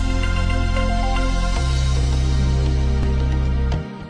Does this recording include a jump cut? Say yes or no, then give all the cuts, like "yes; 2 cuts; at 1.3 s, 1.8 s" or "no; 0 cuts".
no; 0 cuts